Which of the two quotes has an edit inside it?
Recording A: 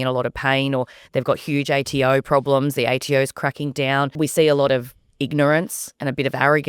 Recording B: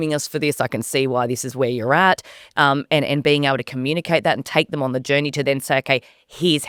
A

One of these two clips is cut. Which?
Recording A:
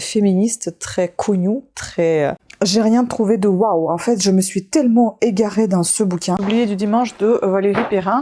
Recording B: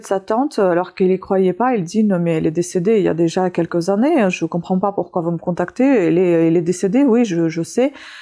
A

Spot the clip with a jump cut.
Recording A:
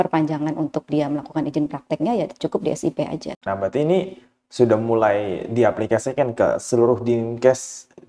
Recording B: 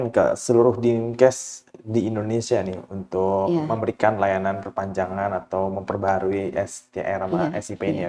A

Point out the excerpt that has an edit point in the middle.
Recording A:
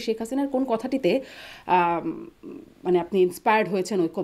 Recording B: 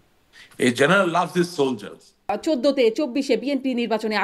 B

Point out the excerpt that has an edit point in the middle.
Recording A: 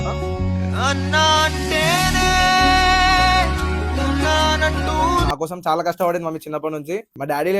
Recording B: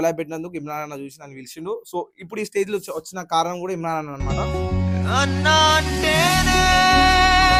A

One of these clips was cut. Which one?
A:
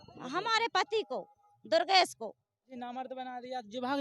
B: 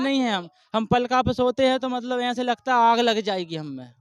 A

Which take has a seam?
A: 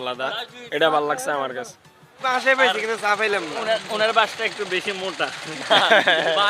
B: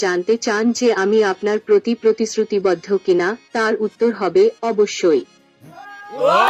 A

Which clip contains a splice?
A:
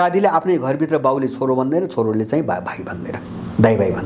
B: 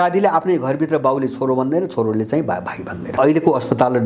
B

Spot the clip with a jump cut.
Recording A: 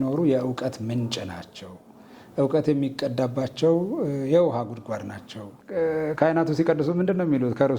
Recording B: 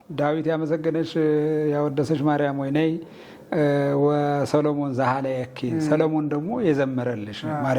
A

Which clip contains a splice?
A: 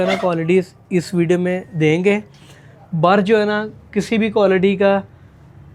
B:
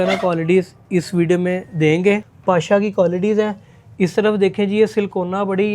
B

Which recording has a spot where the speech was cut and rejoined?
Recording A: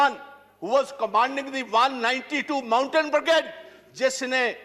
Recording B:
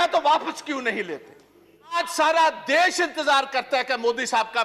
B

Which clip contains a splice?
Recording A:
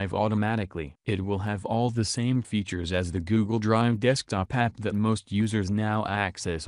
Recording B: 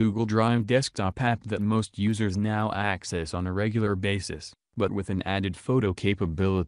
A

